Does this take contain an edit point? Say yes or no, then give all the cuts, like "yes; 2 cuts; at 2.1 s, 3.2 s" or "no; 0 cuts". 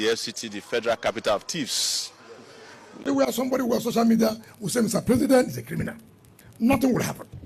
yes; 1 cut; at 3.0 s